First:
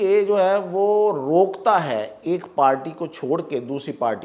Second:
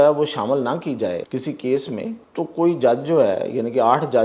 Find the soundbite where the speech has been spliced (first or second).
second